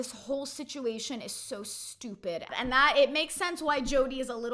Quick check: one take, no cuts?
no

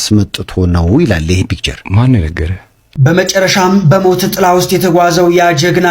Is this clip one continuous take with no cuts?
no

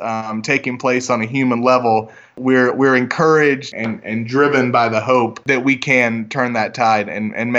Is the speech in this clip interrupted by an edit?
yes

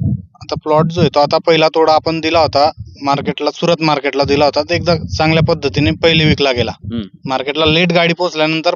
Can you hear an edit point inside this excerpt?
no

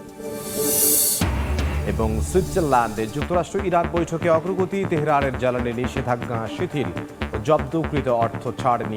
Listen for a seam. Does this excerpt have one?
no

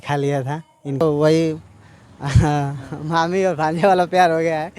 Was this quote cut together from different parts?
yes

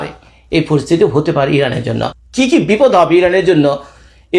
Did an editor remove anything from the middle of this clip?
yes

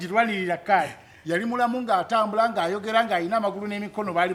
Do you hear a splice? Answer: no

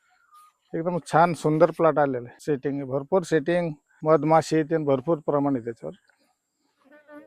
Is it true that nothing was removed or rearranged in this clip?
no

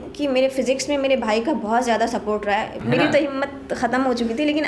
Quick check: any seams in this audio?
yes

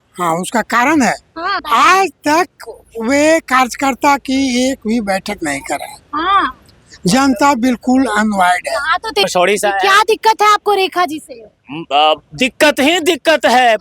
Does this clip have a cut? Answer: yes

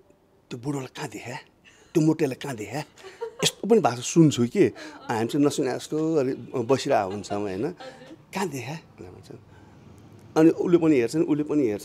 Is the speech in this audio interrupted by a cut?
no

